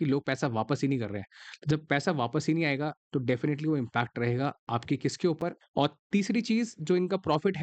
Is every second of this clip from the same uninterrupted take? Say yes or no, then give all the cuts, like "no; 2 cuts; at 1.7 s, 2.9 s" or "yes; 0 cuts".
no; 1 cut; at 5.6 s